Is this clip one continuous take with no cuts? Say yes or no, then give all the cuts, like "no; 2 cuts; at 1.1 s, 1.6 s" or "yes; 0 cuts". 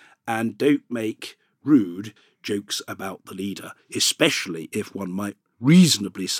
no; 1 cut; at 2.2 s